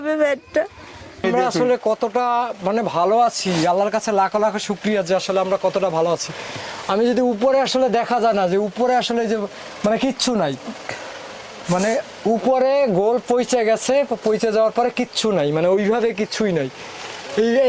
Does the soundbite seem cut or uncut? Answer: cut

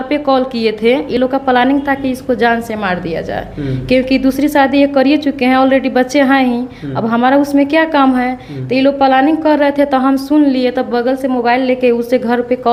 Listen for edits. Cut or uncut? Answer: uncut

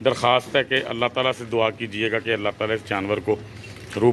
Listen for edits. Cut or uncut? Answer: uncut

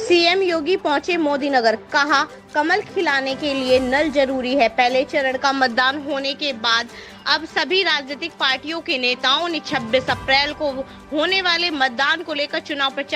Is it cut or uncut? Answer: uncut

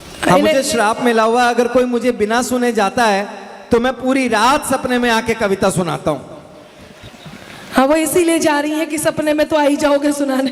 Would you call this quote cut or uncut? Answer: uncut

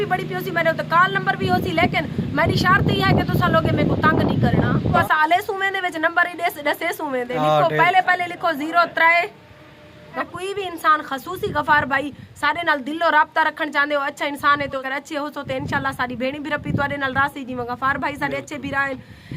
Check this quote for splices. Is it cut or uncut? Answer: cut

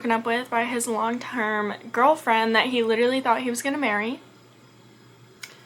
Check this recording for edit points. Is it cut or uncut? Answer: uncut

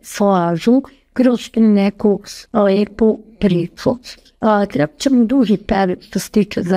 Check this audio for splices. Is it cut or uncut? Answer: uncut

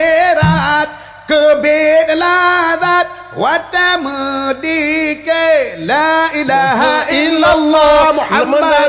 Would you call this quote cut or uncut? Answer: uncut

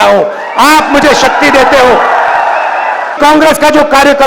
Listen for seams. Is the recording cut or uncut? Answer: cut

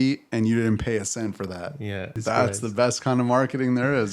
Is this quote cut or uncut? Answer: cut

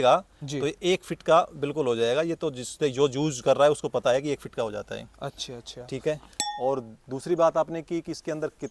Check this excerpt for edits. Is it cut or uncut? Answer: cut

